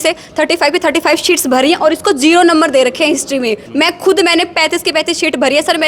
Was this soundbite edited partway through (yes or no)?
yes